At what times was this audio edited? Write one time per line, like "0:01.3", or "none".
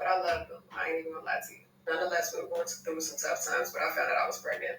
0:02.3